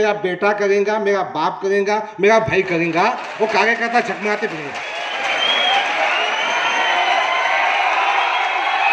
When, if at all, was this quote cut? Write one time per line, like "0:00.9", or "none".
none